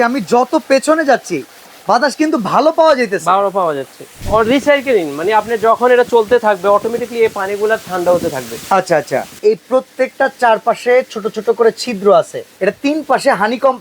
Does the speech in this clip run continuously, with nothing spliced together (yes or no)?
no